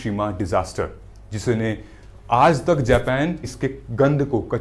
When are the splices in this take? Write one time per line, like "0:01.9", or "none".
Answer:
0:03.5